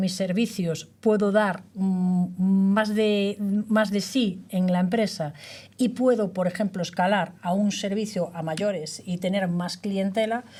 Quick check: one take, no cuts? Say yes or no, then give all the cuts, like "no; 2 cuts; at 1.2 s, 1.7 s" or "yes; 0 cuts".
yes; 0 cuts